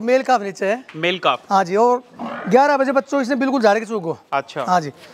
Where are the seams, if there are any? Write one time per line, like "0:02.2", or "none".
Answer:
none